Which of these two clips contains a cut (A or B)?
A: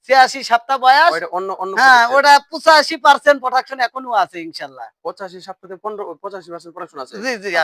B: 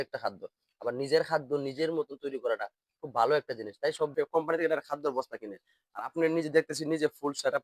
B